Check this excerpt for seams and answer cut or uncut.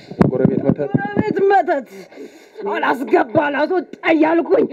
cut